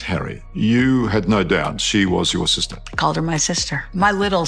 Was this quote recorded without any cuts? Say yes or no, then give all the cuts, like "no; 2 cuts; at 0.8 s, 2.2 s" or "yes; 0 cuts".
yes; 0 cuts